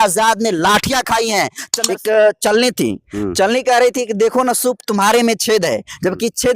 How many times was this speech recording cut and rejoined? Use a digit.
1